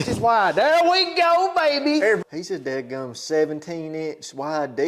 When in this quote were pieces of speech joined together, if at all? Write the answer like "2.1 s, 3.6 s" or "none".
2.2 s